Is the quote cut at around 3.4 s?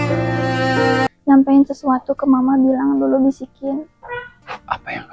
no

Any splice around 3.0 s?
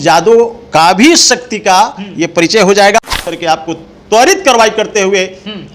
yes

